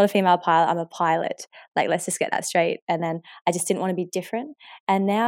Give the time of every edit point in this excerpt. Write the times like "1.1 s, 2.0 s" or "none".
none